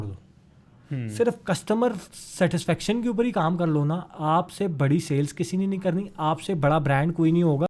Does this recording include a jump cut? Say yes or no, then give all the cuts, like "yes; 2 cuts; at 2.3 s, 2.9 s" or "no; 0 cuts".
no; 0 cuts